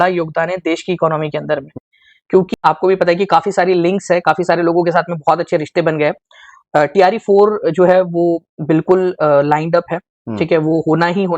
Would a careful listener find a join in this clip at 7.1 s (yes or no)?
no